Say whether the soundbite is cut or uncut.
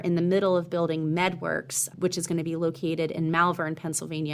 uncut